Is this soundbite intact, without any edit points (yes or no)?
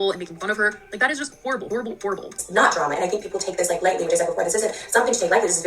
no